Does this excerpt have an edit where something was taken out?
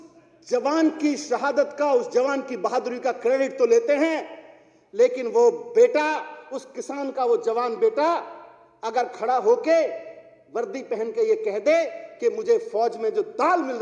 no; 0 cuts

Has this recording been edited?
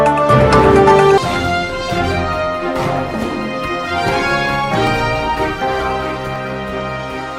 no; 0 cuts

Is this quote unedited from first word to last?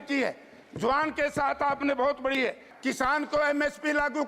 no; 1 cut; at 2.7 s

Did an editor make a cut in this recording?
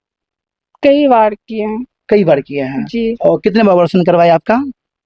no; 0 cuts

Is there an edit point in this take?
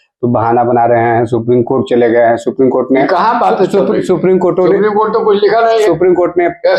no; 0 cuts

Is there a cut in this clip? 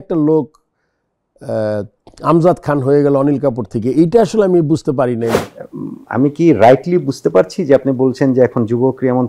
yes; 1 cut; at 5.4 s

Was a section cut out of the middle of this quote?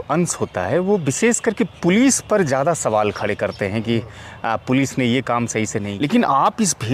yes; 1 cut; at 5.9 s

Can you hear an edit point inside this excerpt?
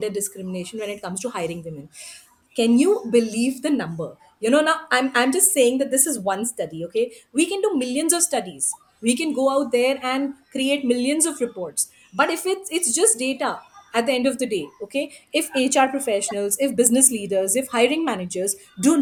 no; 0 cuts

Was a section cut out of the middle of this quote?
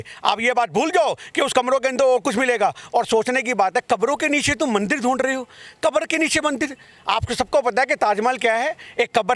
no; 0 cuts

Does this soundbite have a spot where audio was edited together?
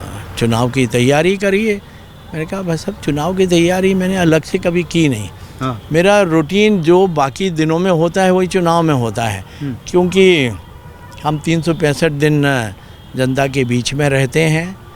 no; 0 cuts

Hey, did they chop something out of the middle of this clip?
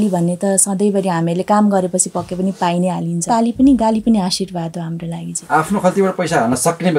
yes; 2 cuts; at 3.3 s, 5.3 s

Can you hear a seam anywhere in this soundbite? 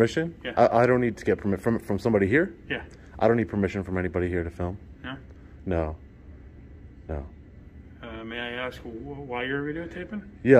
no; 0 cuts

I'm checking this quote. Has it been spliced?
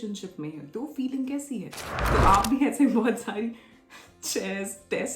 yes; 1 cut; at 2.0 s

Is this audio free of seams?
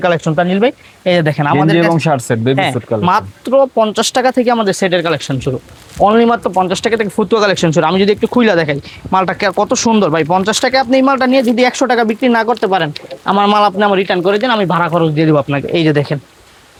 yes; 0 cuts

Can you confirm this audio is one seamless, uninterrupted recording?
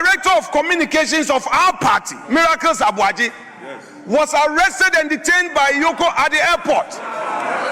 yes; 0 cuts

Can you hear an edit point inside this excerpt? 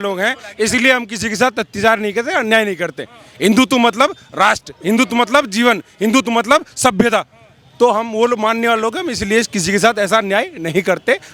no; 0 cuts

